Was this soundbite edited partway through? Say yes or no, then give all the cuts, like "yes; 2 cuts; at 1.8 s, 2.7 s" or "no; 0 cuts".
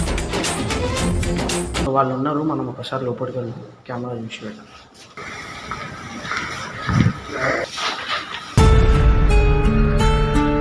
yes; 1 cut; at 1.8 s